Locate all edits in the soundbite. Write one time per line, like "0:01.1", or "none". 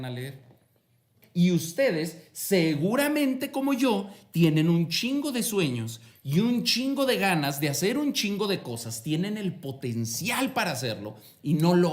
0:01.2